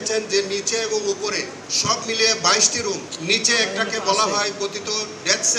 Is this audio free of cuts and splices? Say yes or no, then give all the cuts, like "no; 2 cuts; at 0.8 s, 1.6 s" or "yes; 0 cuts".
no; 2 cuts; at 1.6 s, 3.1 s